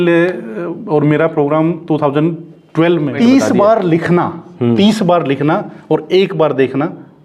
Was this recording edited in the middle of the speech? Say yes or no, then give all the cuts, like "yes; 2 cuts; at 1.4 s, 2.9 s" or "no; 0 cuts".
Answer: yes; 1 cut; at 3.1 s